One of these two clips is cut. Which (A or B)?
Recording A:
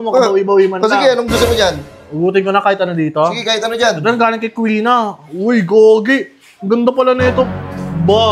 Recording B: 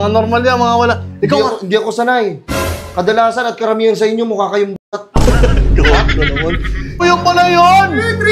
B